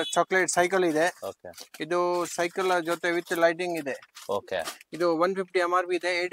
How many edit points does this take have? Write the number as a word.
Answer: zero